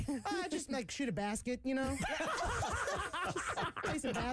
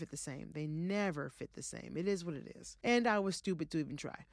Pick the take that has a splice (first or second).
second